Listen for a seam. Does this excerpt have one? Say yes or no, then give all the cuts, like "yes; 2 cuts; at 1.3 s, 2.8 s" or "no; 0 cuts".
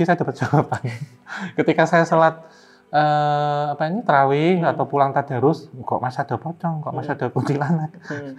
no; 0 cuts